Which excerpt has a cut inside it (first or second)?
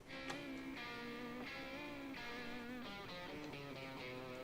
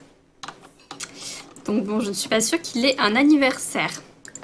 first